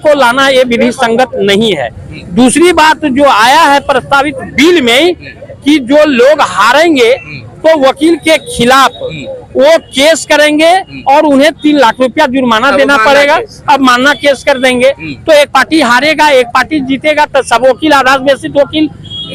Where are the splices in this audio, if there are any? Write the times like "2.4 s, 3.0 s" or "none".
none